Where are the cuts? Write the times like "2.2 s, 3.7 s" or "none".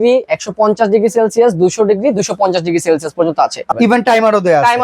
3.7 s